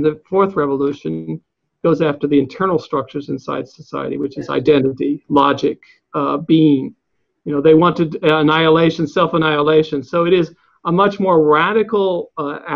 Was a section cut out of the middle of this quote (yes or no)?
no